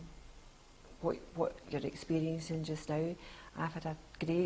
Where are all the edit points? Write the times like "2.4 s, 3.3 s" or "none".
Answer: none